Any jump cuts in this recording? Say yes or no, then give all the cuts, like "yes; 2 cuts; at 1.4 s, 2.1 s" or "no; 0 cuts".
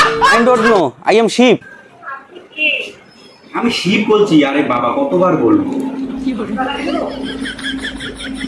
yes; 1 cut; at 1.7 s